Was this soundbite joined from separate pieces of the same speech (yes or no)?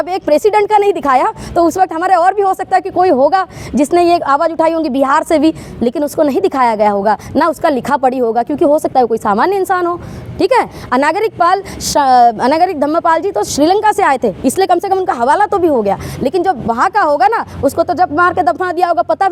no